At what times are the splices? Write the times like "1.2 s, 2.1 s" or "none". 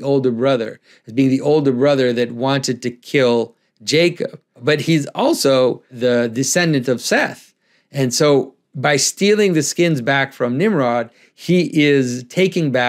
4.6 s, 5.9 s